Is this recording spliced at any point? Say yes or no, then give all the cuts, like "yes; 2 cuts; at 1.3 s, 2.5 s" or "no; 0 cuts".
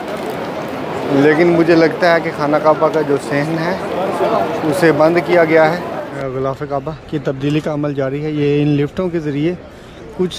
yes; 1 cut; at 6.1 s